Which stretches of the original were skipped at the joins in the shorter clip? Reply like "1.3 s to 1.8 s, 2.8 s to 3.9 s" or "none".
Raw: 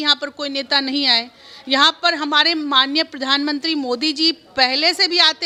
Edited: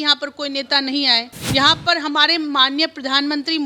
1.3 s to 1.5 s